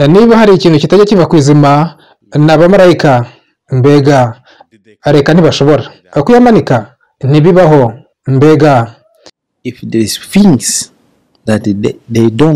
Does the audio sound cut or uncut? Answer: uncut